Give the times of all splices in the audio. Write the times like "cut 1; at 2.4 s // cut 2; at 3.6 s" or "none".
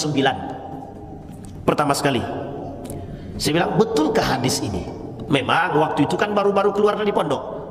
none